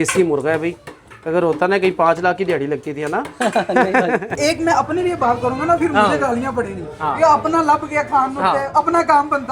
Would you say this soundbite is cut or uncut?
cut